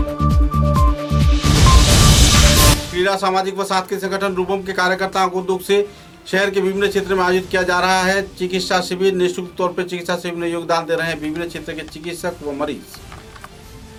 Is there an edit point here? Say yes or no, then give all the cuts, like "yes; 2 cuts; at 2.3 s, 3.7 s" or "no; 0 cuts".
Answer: no; 0 cuts